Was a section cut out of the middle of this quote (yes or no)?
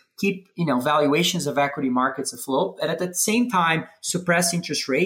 no